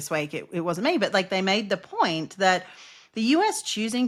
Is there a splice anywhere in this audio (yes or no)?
no